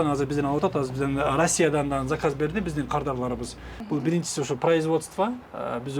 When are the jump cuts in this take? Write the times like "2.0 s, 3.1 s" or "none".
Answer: 3.7 s